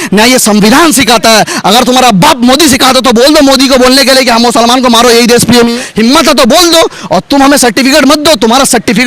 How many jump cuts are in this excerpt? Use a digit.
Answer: 1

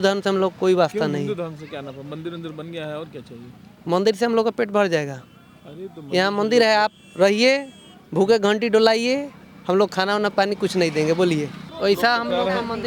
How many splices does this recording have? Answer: 1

